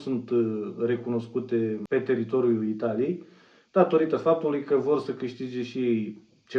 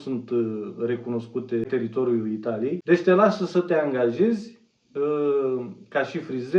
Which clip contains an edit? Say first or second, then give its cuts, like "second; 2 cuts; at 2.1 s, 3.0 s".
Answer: second; 2 cuts; at 1.7 s, 2.8 s